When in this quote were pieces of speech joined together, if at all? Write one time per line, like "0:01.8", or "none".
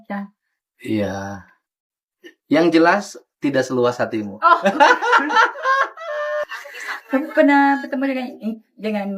0:06.4